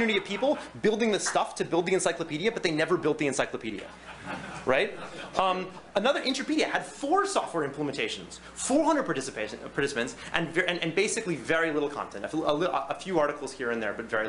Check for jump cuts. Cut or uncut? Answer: uncut